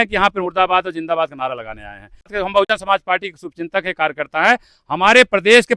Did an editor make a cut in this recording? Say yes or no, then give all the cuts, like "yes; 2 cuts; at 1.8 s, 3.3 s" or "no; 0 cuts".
yes; 1 cut; at 2.3 s